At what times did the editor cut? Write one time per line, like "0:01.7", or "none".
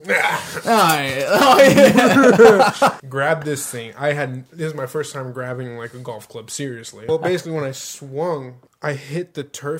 0:03.0
0:07.1
0:08.6